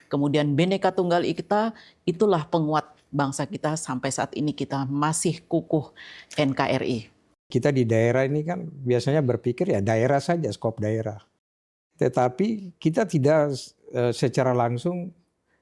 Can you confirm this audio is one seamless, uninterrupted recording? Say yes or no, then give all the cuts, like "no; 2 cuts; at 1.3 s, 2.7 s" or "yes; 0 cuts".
no; 1 cut; at 7.5 s